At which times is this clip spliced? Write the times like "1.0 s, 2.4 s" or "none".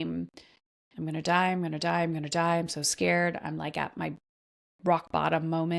none